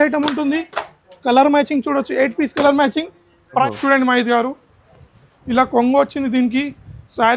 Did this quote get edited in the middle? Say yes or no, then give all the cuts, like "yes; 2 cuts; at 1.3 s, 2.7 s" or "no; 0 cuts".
yes; 1 cut; at 3.7 s